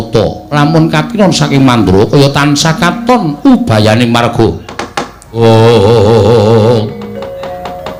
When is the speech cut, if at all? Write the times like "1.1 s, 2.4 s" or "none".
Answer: none